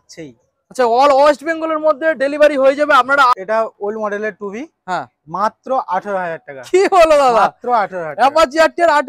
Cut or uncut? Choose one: cut